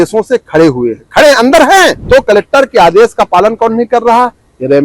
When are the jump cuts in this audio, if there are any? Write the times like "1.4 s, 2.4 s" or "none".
2.0 s